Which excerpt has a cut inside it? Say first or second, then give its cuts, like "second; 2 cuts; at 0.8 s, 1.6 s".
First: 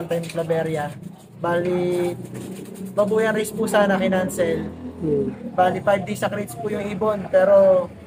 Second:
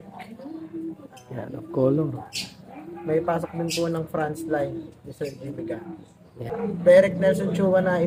second; 1 cut; at 6.5 s